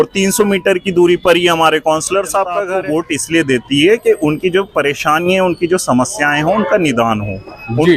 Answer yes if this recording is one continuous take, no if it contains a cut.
no